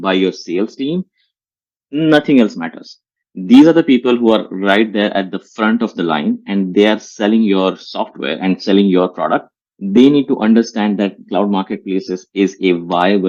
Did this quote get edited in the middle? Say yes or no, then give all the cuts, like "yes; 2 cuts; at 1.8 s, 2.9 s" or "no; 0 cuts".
no; 0 cuts